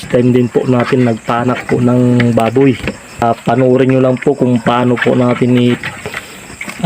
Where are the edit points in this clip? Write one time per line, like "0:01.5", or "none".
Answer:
0:03.2